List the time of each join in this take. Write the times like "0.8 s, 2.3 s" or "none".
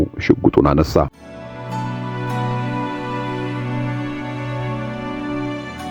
1.0 s